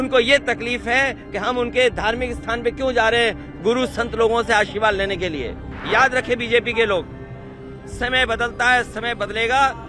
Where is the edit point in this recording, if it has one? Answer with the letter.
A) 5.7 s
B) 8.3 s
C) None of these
A